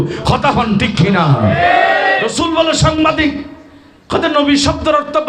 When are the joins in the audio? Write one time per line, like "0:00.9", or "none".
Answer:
0:02.3